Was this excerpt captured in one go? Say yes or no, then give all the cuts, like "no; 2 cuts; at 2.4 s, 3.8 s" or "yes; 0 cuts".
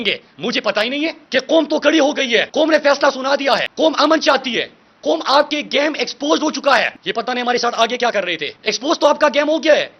no; 1 cut; at 1.2 s